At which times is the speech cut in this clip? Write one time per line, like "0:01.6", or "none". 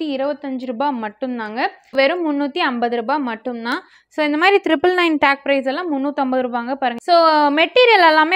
0:01.9
0:07.0